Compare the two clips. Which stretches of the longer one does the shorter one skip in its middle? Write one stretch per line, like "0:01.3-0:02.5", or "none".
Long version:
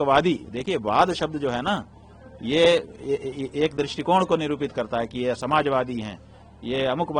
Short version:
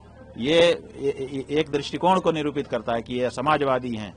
none